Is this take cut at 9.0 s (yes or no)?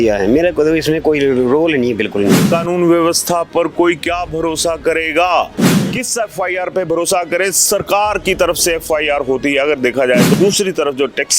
no